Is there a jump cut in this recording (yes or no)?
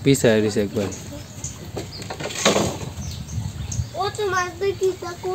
no